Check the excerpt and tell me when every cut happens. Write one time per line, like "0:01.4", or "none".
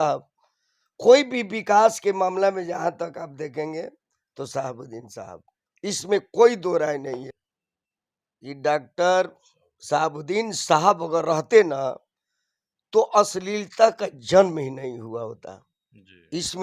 0:07.3